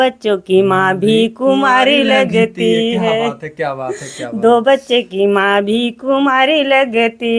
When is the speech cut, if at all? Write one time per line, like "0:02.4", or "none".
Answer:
none